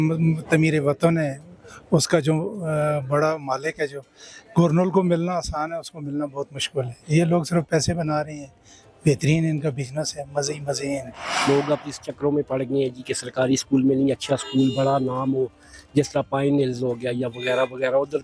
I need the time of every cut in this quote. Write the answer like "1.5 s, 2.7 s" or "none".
11.4 s

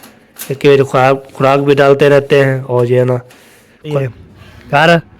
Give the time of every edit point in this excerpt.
3.9 s

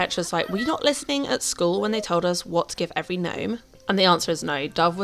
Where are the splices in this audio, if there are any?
none

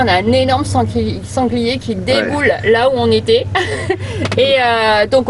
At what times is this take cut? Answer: none

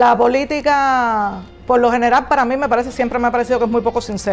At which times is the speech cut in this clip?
1.5 s

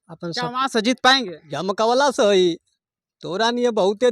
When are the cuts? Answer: 1.4 s

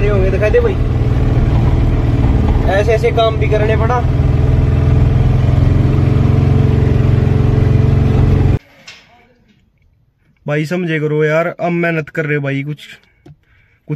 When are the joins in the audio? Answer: 8.6 s

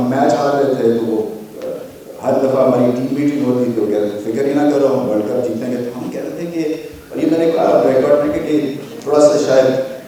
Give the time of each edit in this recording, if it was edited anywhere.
none

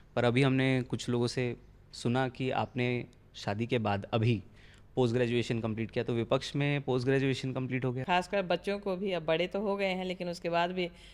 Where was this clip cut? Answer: 8.0 s

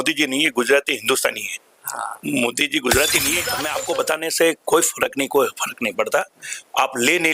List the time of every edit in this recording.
3.6 s

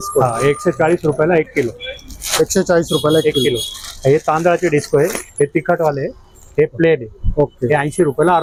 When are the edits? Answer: none

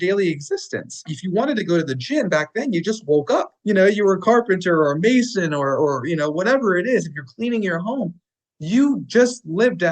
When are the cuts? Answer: 1.2 s, 3.5 s

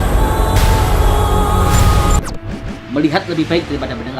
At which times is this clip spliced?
2.7 s

